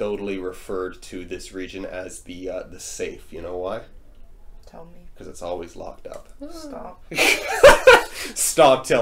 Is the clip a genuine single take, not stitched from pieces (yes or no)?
yes